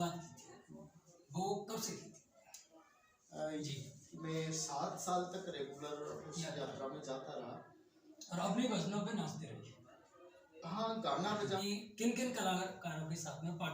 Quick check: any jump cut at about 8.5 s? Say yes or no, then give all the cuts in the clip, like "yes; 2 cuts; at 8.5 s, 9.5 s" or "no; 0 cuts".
no; 2 cuts; at 3.6 s, 11.6 s